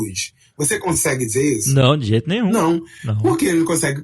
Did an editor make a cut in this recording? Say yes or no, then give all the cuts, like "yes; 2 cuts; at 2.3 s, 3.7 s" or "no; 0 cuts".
yes; 1 cut; at 2.5 s